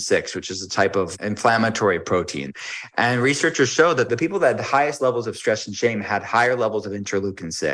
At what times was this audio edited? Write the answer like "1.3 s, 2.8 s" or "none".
1.1 s, 2.5 s, 4.1 s